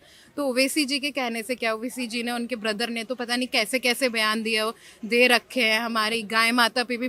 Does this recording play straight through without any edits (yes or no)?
yes